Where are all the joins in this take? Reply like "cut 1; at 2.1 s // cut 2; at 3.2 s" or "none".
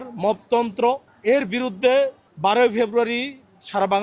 cut 1; at 1.1 s // cut 2; at 2.2 s